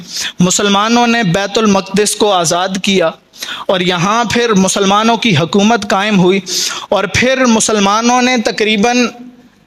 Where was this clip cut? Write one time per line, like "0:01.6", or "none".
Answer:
none